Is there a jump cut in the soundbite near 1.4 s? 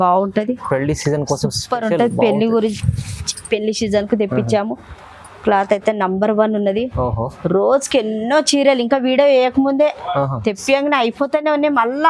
no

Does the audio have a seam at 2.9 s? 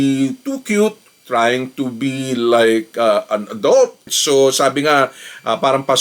no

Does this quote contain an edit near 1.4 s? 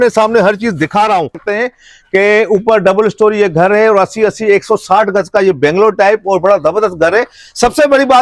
yes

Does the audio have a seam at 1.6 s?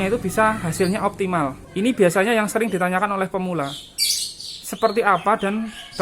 yes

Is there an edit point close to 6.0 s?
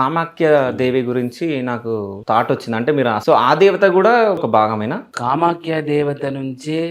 no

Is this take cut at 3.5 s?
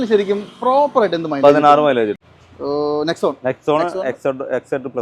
no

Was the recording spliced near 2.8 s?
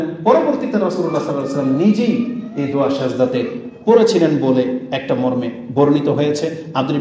no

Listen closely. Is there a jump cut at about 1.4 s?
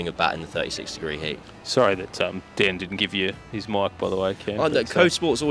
yes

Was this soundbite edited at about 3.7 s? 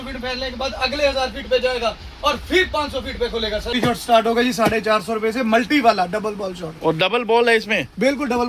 yes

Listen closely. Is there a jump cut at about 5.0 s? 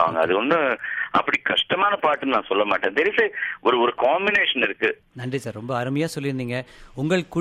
yes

